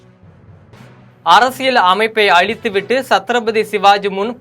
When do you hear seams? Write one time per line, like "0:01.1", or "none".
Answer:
0:01.2